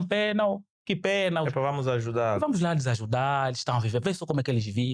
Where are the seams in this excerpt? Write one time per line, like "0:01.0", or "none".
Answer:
none